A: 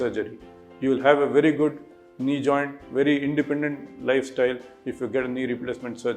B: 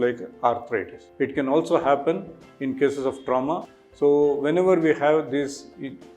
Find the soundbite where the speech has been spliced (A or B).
B